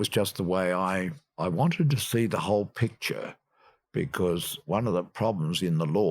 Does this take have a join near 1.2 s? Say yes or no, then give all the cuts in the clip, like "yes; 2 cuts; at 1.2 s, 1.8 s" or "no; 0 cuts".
yes; 1 cut; at 1.2 s